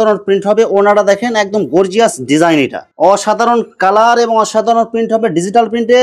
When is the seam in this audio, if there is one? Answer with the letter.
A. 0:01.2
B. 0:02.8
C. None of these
B